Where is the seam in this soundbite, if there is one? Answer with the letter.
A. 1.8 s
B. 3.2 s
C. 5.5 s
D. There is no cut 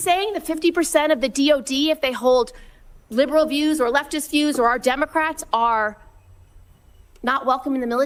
D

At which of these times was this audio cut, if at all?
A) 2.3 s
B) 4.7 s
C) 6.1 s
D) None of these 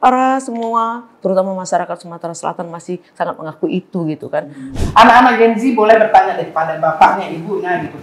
B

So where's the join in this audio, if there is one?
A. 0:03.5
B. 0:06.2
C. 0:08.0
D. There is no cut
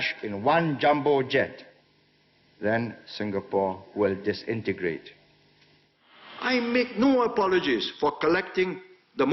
B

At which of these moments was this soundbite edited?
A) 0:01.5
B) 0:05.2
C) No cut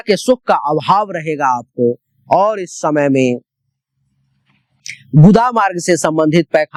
C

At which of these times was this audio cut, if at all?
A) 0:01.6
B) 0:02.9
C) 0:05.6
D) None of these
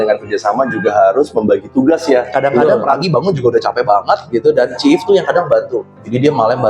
B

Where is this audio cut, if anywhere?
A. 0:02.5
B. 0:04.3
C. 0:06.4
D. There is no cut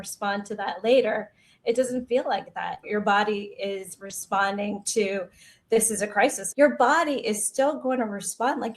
C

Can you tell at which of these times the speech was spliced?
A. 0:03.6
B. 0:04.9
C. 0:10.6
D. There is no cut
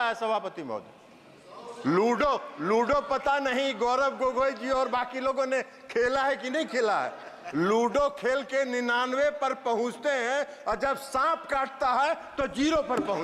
D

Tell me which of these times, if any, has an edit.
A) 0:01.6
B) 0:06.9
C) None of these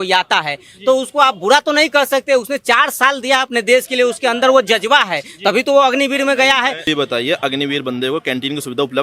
B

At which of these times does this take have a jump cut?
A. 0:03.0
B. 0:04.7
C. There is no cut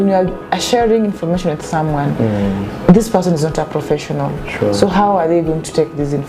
C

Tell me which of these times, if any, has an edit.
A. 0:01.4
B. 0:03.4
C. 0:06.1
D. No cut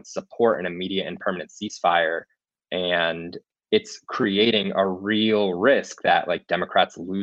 B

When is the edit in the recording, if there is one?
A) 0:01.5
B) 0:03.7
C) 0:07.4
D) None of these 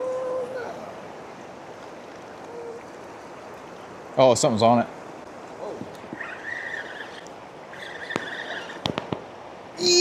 D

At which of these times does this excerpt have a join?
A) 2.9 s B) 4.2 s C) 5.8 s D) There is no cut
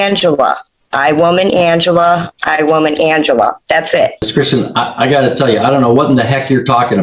B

